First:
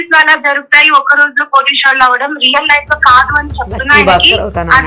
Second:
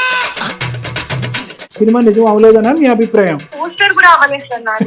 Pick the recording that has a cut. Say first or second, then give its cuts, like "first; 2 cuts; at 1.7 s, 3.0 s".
second; 2 cuts; at 1.8 s, 3.5 s